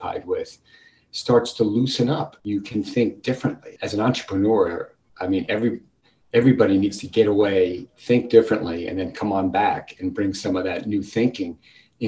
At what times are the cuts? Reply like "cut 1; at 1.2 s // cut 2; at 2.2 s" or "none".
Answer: cut 1; at 2.4 s // cut 2; at 3.7 s